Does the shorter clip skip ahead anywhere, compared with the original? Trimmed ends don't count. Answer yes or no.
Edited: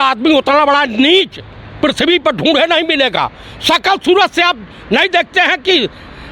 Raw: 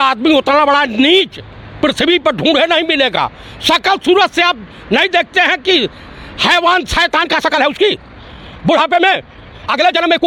no